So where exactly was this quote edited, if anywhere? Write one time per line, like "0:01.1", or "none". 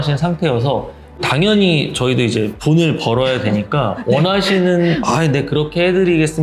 0:01.2
0:02.6

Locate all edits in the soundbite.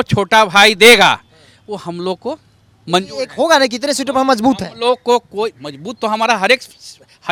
none

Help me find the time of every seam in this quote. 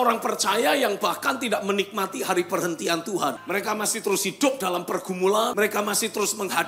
0:03.4
0:05.5

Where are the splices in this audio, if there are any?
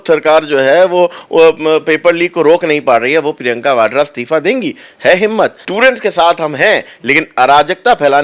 0:05.6

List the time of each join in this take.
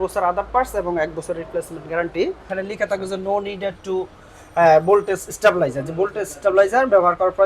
0:02.5

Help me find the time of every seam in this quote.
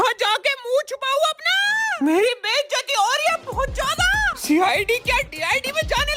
none

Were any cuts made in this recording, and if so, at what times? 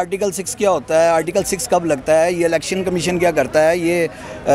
none

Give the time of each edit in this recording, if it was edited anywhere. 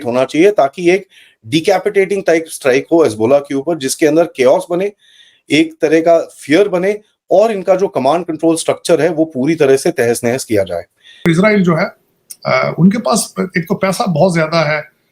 0:11.3

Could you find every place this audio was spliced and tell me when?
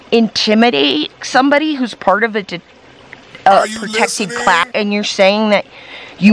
0:04.6

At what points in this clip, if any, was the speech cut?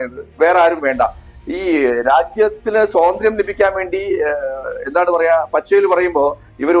none

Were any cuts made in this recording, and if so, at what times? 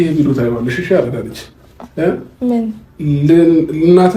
none

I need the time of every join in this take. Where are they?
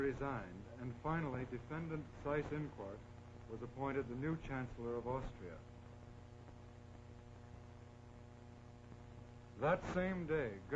0:03.7

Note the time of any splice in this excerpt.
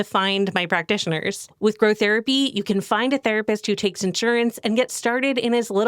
0:01.5

